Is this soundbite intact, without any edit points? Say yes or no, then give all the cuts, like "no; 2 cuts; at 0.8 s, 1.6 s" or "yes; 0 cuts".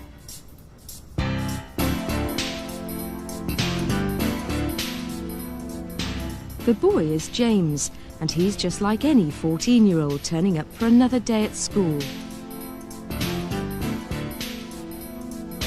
no; 1 cut; at 3.2 s